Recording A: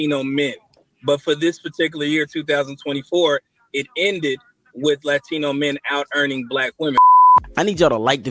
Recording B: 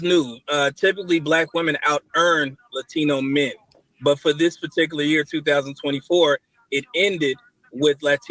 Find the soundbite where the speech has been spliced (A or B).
A